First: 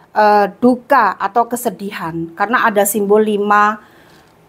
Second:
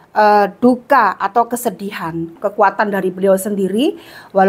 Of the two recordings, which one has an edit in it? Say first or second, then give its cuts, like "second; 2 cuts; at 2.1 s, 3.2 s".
second; 1 cut; at 2.3 s